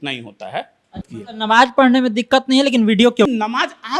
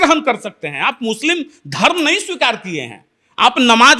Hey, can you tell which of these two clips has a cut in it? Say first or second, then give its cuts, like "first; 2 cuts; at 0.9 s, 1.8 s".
first; 2 cuts; at 1.1 s, 3.3 s